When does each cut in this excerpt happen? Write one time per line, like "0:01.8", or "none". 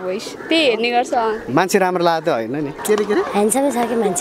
0:02.8